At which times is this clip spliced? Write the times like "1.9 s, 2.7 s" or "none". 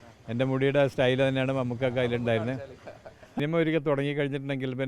3.4 s